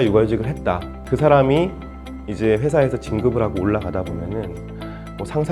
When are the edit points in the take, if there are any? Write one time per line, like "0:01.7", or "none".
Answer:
0:01.0